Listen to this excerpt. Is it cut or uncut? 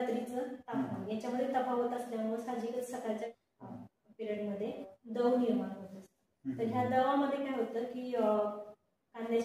cut